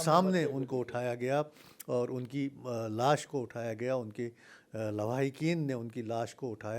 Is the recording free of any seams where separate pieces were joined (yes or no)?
yes